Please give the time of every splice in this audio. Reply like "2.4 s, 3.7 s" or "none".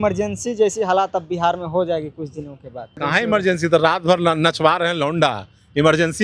2.9 s